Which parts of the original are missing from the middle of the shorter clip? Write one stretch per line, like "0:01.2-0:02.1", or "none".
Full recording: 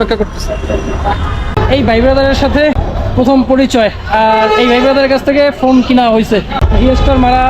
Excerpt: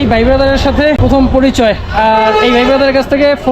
0:02.8-0:03.1